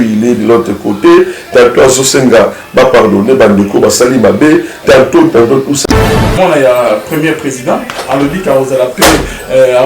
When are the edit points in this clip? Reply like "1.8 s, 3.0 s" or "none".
6.1 s